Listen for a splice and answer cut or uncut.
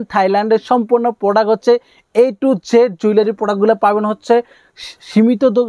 uncut